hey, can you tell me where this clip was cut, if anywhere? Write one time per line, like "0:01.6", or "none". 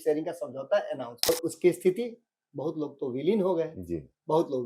0:01.3